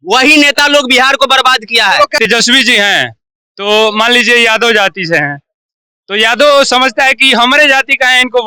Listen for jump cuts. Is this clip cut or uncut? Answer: cut